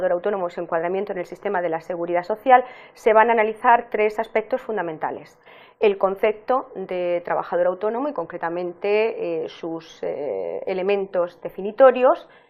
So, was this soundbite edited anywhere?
yes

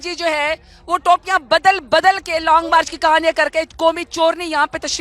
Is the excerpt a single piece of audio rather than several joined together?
yes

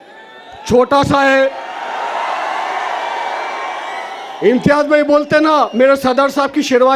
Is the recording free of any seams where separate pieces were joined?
yes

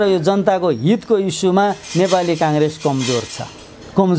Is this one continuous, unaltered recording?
yes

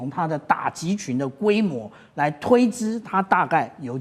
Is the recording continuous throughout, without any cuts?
yes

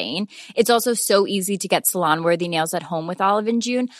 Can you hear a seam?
no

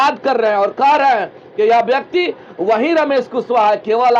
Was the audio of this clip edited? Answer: no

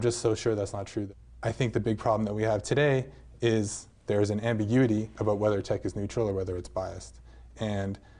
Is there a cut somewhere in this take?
yes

